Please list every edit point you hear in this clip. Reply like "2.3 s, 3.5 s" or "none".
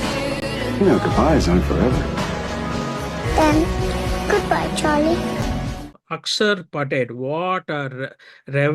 5.8 s

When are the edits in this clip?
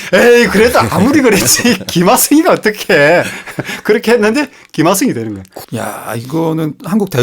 5.6 s

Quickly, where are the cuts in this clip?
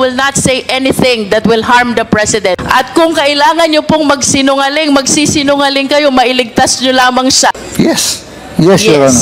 2.6 s, 7.6 s

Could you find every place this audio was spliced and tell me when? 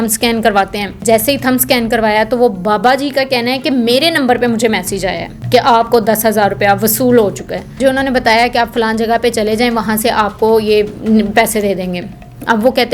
1.0 s, 5.3 s, 7.8 s

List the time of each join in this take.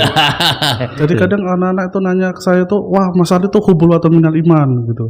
1.0 s

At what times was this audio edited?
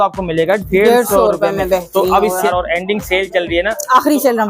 2.5 s

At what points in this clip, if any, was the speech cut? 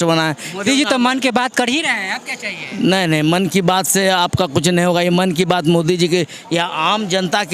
none

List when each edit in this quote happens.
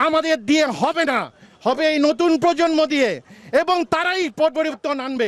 none

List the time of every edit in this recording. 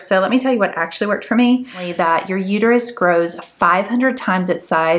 1.9 s

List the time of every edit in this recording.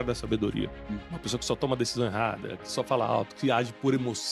1.1 s

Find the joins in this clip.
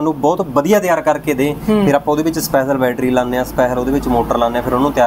none

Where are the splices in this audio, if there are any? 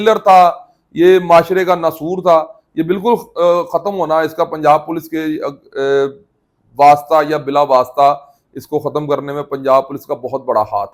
none

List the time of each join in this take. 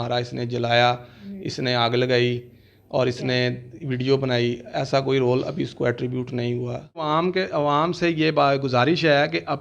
7.0 s

